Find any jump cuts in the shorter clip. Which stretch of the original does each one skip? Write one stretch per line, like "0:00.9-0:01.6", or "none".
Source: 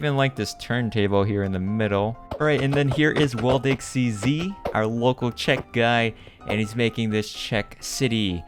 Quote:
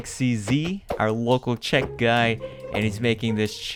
none